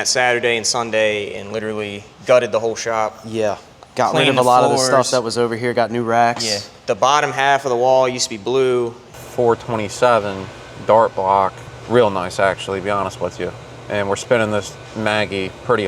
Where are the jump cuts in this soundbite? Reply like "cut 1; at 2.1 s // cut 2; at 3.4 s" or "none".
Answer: cut 1; at 3.7 s // cut 2; at 9.2 s